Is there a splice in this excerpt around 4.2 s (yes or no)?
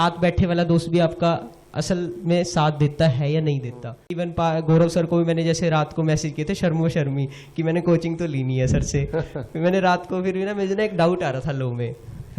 yes